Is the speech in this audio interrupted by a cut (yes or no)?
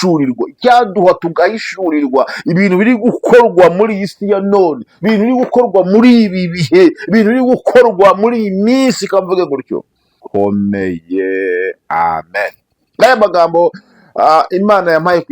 yes